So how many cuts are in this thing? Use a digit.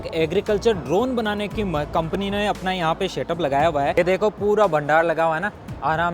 1